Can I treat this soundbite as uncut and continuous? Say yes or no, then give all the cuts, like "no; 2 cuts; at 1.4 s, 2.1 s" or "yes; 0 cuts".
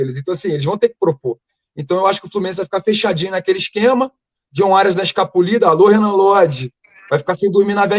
yes; 0 cuts